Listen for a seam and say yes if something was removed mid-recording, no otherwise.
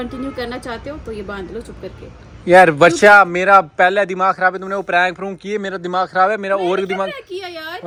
no